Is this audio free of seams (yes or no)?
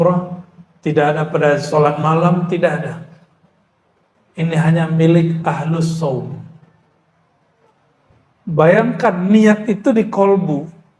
no